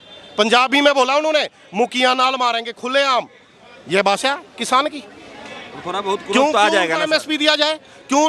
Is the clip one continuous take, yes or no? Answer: yes